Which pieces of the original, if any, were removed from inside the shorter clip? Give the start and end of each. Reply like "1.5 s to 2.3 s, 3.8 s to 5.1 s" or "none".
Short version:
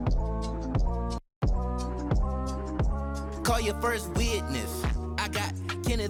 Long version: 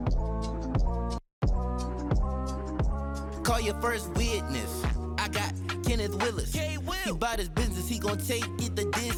none